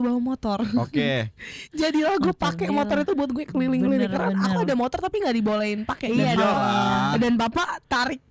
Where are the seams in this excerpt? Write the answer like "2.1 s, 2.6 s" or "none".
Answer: none